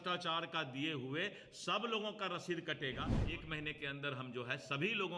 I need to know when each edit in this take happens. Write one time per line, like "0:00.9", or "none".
0:03.1

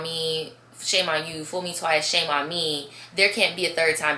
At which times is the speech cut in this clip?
none

